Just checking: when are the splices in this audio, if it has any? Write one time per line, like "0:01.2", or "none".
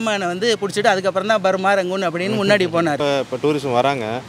0:03.0